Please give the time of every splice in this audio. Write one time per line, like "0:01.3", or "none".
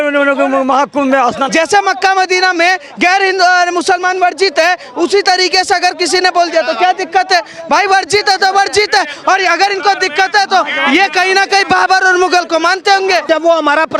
0:01.5
0:13.3